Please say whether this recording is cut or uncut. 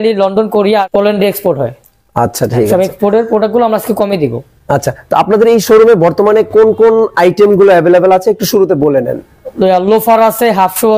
uncut